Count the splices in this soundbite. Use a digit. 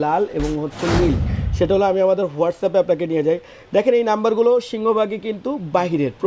1